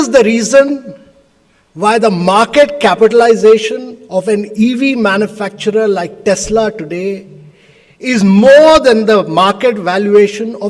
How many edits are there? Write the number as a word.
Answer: zero